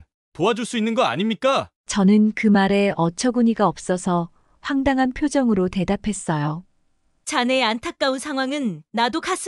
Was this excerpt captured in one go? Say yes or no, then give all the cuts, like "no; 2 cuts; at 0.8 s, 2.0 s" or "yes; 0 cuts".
yes; 0 cuts